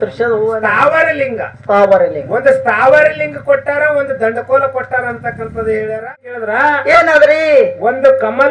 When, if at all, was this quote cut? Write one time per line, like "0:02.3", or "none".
0:06.2